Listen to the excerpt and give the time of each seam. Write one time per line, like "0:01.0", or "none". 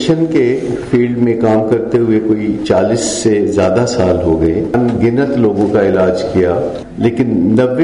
0:04.7
0:06.8